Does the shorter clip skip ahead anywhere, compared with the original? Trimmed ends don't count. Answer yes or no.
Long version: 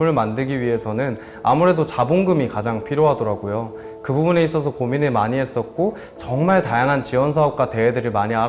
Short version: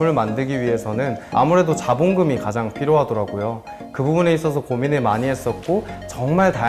yes